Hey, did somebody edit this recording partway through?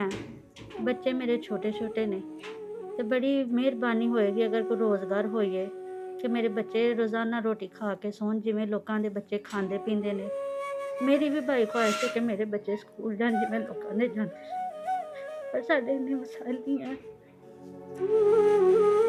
no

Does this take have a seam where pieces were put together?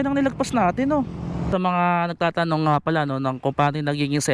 yes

